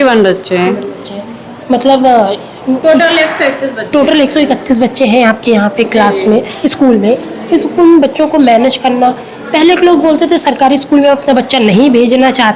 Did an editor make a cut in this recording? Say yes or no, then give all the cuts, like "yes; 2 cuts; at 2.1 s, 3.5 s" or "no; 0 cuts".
no; 0 cuts